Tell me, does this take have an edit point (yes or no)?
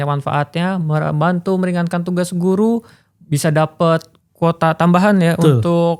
no